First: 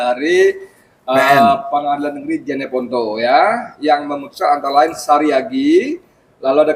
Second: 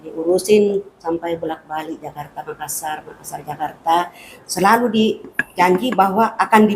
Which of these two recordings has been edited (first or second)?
second